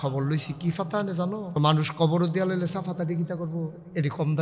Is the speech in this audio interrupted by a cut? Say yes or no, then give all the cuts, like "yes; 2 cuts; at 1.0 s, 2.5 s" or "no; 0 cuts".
yes; 1 cut; at 1.5 s